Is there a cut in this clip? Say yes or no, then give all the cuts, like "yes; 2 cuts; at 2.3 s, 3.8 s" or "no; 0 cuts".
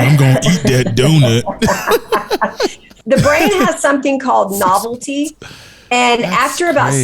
yes; 1 cut; at 2.9 s